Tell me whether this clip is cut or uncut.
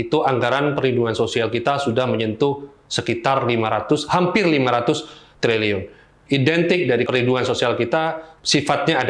cut